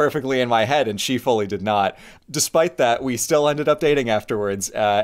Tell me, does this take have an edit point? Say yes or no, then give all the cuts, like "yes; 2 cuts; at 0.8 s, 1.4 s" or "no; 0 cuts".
yes; 1 cut; at 2.1 s